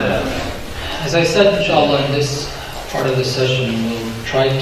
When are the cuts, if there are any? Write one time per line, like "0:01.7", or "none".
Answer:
none